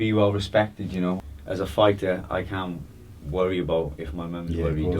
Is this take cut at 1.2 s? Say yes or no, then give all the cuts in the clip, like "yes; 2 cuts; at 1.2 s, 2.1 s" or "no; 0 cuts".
yes; 1 cut; at 1.2 s